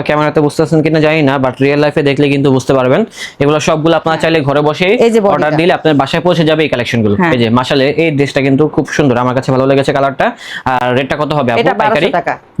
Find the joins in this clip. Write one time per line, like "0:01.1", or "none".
none